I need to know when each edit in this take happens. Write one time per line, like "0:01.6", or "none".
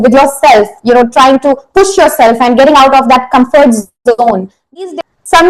0:04.5